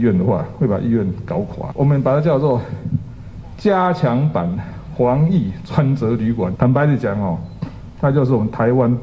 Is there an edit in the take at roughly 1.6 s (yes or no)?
yes